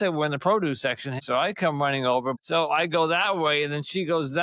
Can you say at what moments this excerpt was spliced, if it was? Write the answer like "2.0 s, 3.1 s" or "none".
1.2 s, 2.4 s